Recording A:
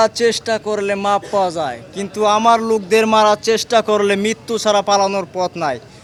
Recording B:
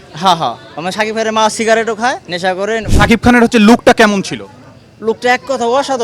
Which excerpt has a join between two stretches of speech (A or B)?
B